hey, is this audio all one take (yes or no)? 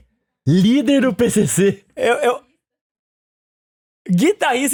yes